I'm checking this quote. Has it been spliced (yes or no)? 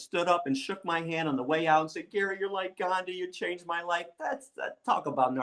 yes